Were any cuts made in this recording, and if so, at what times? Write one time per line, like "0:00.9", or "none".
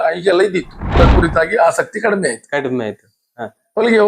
0:01.0